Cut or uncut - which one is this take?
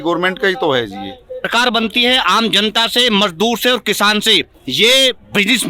cut